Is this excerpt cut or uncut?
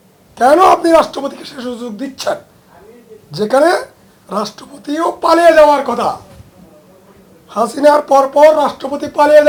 uncut